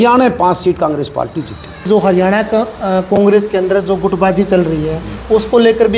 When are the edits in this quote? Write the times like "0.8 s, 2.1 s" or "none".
1.9 s